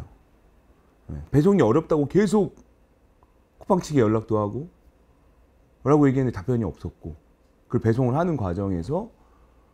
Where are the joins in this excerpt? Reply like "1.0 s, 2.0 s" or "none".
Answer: 1.3 s